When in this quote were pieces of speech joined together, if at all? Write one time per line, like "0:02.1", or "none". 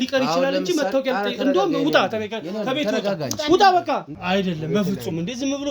0:04.1